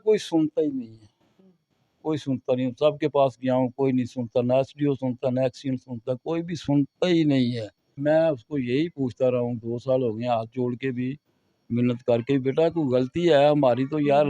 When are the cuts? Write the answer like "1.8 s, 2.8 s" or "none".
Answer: 7.9 s